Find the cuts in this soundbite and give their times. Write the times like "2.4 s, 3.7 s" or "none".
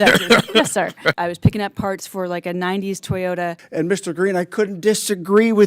1.2 s, 3.6 s